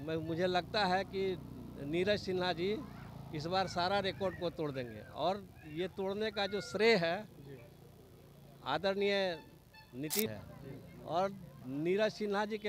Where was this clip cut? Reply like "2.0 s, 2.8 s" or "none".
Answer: 10.3 s